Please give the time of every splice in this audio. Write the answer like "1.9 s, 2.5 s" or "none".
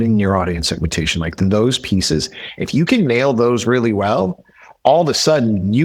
none